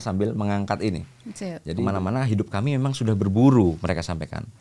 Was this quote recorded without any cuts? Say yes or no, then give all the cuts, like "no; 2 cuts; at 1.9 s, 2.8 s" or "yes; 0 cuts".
no; 1 cut; at 1.7 s